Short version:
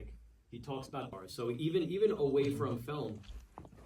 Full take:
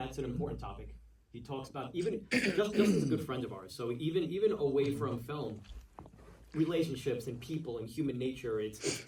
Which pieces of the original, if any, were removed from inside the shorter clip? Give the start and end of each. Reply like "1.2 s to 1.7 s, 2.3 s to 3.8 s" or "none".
1.9 s to 3.5 s